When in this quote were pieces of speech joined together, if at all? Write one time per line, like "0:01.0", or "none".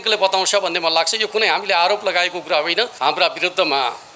0:02.9